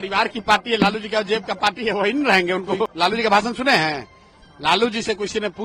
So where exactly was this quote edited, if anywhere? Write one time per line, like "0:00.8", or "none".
0:02.9